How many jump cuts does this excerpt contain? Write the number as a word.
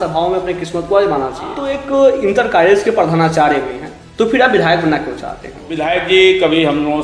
two